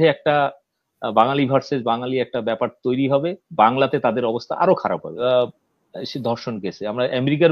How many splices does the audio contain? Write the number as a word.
one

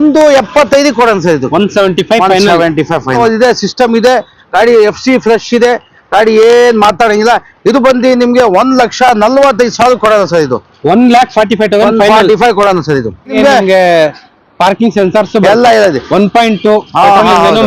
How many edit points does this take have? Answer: two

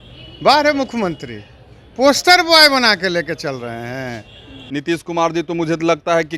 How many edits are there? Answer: one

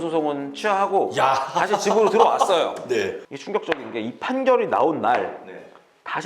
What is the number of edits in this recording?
one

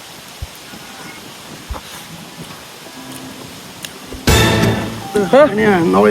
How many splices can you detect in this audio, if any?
two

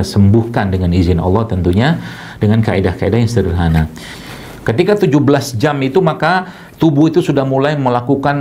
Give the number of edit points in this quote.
one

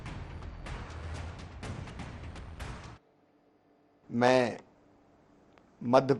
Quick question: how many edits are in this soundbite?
one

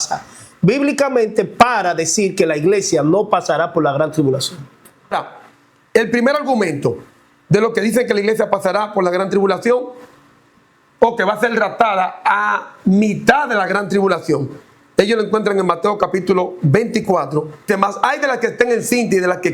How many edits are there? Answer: two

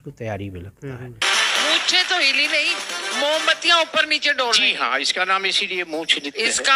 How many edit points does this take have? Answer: one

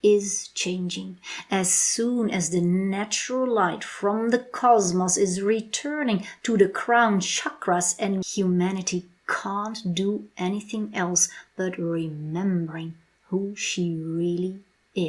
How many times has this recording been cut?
one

